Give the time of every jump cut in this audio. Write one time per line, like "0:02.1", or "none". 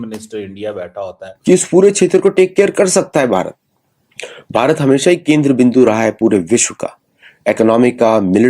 0:01.3